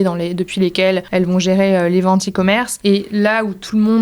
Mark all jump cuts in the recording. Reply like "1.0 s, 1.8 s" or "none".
1.1 s, 2.7 s